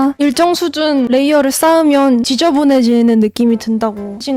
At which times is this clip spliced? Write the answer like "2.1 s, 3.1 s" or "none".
none